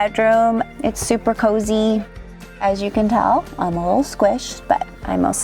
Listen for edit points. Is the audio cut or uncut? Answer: uncut